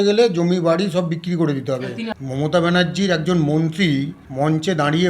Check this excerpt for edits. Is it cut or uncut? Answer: cut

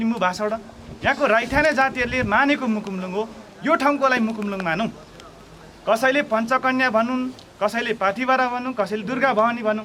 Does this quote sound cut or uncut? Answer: uncut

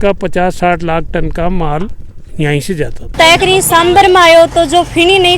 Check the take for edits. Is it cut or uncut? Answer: cut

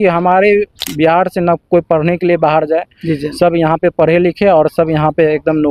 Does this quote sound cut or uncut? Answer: uncut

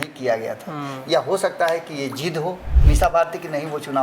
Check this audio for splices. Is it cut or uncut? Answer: cut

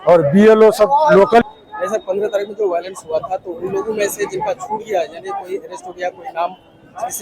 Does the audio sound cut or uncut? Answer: cut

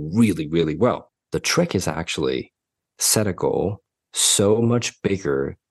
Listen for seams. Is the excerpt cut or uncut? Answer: cut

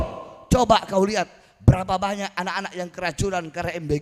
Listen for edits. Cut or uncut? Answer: uncut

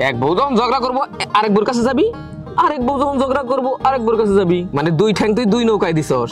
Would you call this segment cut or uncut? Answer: cut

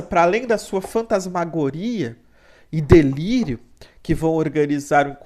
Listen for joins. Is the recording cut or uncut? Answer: uncut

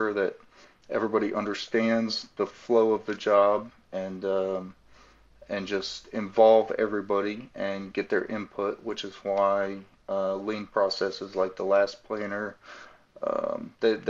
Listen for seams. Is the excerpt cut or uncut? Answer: uncut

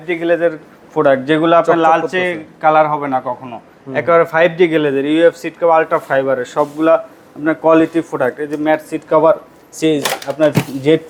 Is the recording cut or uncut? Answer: uncut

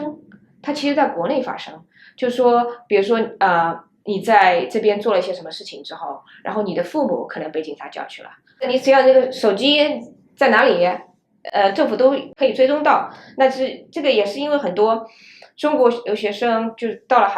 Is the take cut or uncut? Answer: cut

